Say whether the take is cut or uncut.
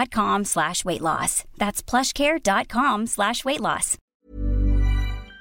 cut